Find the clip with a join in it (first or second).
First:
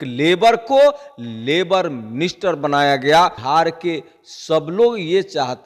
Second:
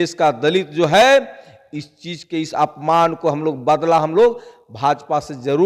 first